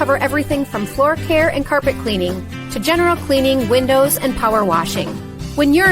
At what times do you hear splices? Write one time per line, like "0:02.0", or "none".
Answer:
0:05.0